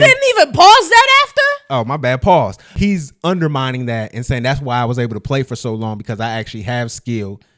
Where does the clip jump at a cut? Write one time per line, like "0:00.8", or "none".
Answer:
0:02.6